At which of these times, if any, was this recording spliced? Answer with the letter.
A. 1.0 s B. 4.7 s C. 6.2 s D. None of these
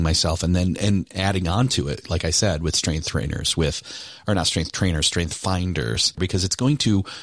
C